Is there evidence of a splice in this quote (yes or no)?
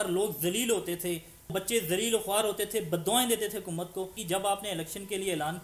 yes